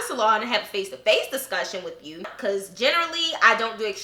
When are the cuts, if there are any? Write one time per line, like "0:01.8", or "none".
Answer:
0:02.3